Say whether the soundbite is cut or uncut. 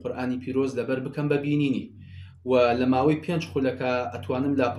uncut